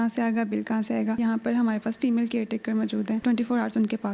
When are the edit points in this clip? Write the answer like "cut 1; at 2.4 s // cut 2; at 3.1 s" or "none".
cut 1; at 1.2 s // cut 2; at 3.2 s